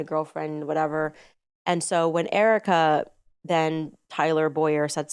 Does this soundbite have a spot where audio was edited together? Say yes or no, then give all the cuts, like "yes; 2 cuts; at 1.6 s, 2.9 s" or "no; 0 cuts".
no; 0 cuts